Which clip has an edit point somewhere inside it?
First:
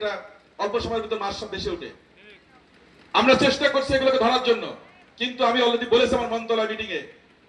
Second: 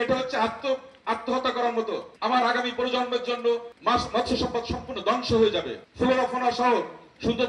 second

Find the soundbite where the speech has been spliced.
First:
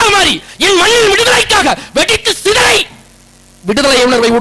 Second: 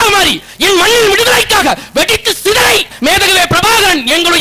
second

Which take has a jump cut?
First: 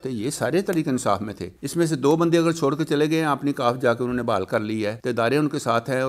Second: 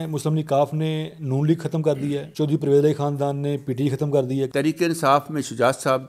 second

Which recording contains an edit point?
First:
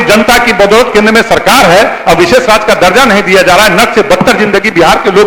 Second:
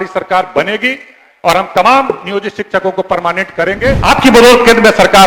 second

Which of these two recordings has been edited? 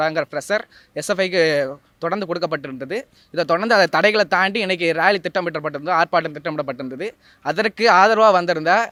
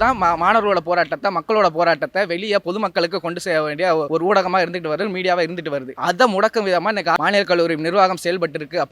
second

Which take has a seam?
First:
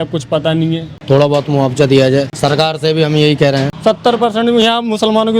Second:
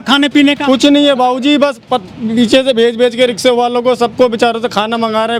first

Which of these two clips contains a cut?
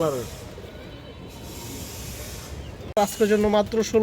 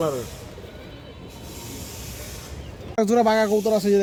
first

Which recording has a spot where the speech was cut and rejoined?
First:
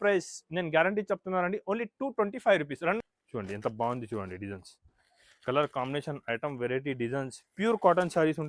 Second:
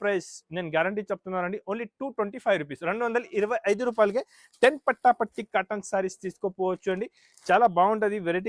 first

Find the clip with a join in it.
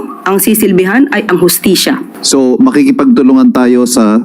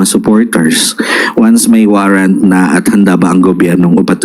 first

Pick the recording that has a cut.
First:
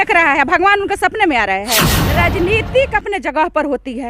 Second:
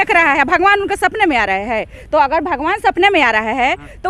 first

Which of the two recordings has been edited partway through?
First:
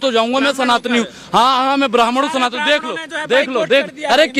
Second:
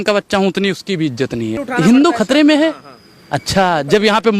second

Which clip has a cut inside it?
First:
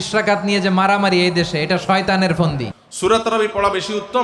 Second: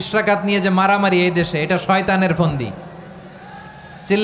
first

